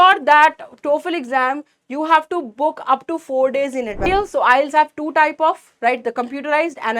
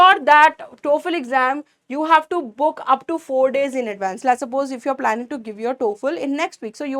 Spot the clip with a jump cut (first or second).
first